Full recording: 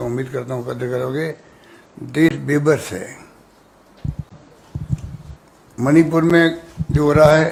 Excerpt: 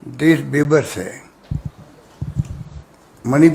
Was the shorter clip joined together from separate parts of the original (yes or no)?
yes